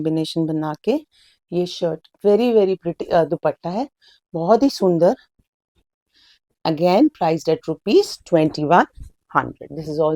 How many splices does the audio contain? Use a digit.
0